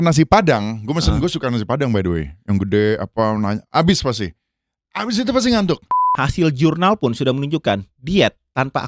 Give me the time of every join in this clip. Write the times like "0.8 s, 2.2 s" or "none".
6.1 s